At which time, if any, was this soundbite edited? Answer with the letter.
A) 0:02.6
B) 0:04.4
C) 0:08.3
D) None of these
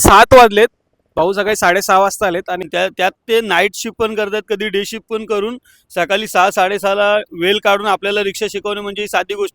A